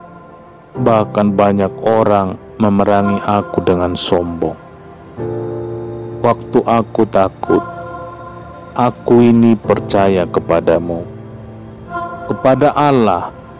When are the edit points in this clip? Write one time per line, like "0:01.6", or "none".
none

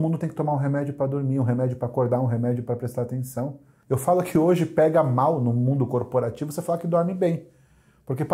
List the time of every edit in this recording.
0:03.7

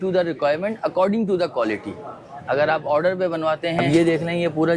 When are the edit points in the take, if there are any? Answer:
0:03.8

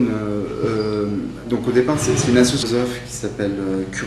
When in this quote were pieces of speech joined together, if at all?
none

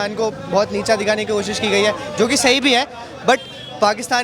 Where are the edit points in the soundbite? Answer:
none

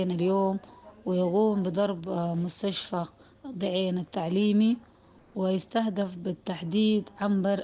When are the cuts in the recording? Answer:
none

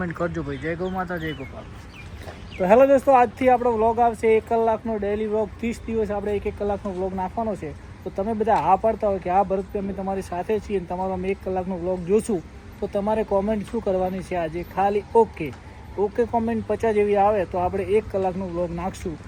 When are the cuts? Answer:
none

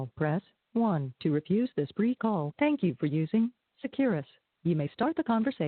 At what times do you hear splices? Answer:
0:02.5

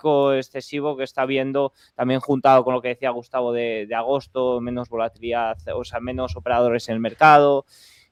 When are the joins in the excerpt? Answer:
none

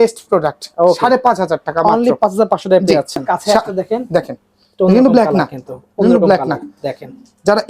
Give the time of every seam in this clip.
0:03.3

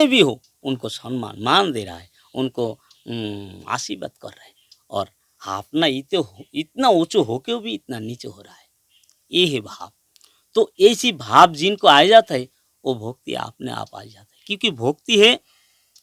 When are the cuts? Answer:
none

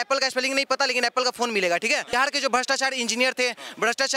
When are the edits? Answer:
0:02.1

